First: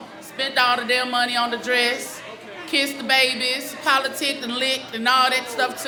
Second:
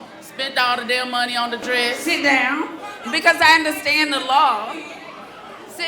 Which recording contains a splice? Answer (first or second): second